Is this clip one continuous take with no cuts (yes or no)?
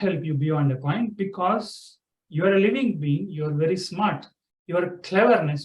yes